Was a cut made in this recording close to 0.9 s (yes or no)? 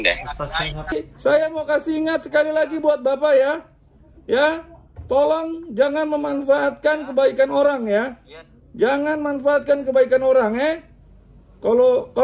yes